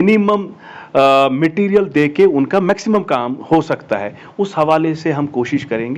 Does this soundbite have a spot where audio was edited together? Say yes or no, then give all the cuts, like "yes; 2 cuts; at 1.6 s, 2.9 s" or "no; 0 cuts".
no; 0 cuts